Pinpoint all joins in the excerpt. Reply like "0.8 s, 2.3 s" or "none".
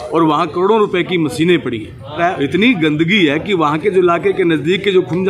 2.2 s